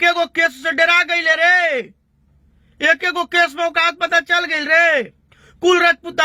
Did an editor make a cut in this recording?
no; 0 cuts

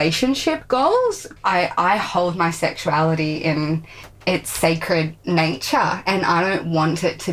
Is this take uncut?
no; 2 cuts; at 0.7 s, 4.1 s

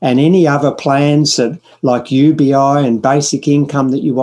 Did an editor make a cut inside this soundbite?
no; 0 cuts

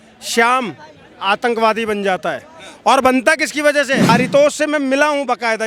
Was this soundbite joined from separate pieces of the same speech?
yes; 1 cut; at 4.1 s

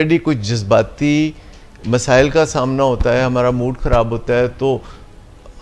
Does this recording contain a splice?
no; 0 cuts

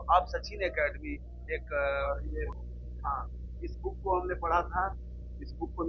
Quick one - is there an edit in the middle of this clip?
yes; 1 cut; at 2.0 s

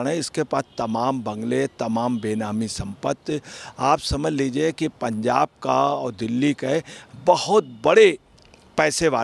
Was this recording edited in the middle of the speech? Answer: no; 0 cuts

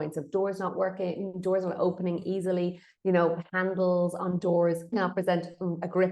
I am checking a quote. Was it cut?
yes; 1 cut; at 4.9 s

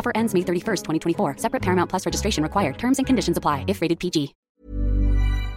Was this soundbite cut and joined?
yes; 1 cut; at 4.5 s

